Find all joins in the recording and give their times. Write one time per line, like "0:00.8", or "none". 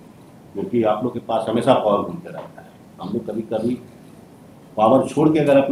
none